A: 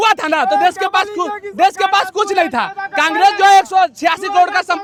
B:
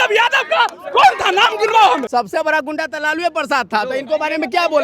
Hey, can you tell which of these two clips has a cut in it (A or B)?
B